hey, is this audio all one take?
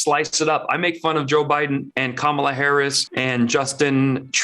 no; 2 cuts; at 1.9 s, 3.1 s

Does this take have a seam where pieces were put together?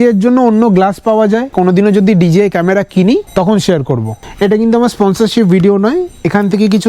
yes; 2 cuts; at 1.5 s, 4.2 s

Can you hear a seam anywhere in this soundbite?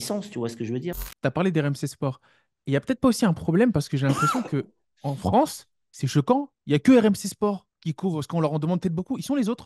yes; 1 cut; at 1.0 s

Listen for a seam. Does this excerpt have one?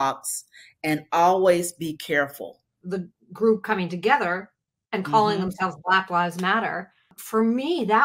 yes; 2 cuts; at 2.7 s, 7.2 s

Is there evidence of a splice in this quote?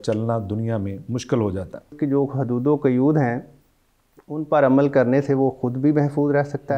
yes; 1 cut; at 1.9 s

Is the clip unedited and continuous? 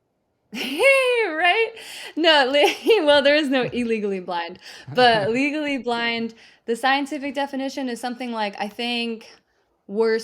yes; 0 cuts

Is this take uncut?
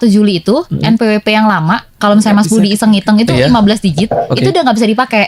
yes; 0 cuts

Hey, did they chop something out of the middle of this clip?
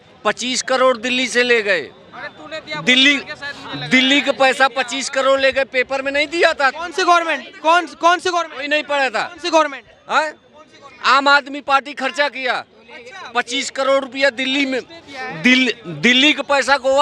no; 0 cuts

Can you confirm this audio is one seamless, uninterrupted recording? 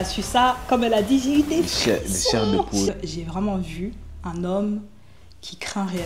no; 1 cut; at 2.9 s

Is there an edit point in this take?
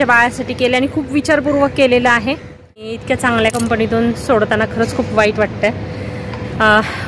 yes; 1 cut; at 2.9 s

